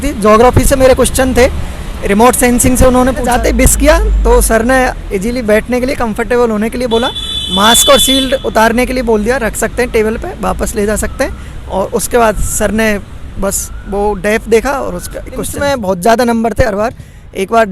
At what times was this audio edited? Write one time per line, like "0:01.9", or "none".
0:03.2
0:15.5